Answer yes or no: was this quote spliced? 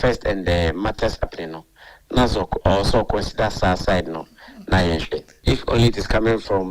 yes